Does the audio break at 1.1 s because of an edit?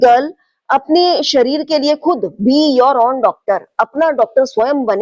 no; 0 cuts

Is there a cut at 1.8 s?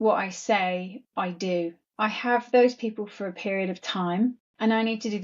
yes; 1 cut; at 1.8 s

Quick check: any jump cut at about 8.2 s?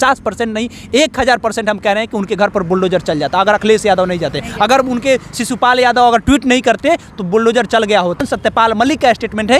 yes; 1 cut; at 8.2 s

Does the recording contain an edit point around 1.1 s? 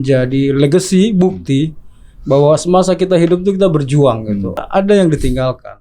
no; 1 cut; at 4.6 s

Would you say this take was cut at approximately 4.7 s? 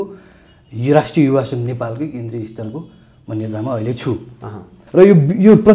yes; 1 cut; at 4.7 s

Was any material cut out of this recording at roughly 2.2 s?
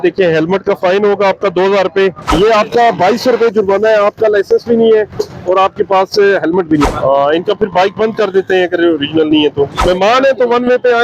yes; 3 cuts; at 2.2 s, 6.8 s, 9.8 s

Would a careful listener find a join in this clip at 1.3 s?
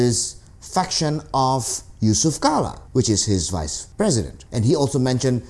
no; 2 cuts; at 2.8 s, 4.2 s

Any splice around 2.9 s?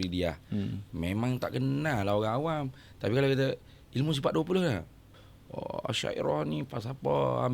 no; 1 cut; at 5.2 s

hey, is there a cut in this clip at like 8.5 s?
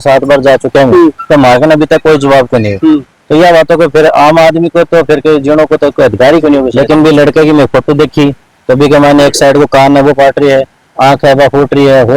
no; 2 cuts; at 1.2 s, 6.7 s

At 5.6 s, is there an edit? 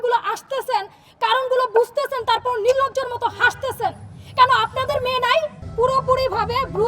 yes; 1 cut; at 5.6 s

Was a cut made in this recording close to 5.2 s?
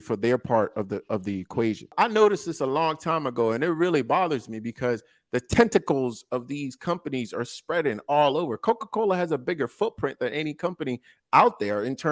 no; 1 cut; at 1.9 s

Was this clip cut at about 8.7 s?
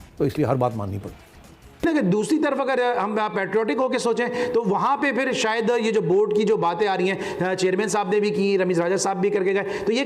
no; 1 cut; at 1.8 s

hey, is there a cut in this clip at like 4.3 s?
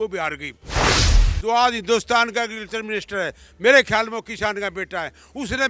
no; 1 cut; at 1.0 s

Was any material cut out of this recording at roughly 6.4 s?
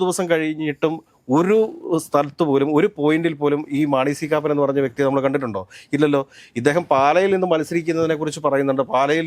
no; 0 cuts

